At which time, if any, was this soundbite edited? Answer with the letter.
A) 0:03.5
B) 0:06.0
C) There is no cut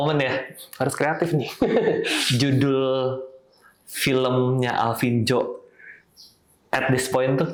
C